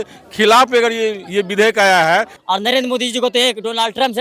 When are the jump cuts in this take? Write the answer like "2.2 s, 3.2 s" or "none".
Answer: 2.3 s